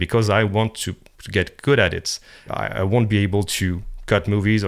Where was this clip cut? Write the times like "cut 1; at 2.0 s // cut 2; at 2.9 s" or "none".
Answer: cut 1; at 2.5 s